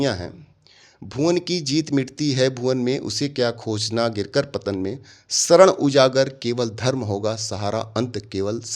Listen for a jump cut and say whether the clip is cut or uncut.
uncut